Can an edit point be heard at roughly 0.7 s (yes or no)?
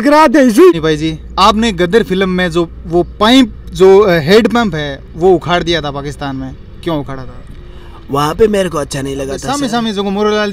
yes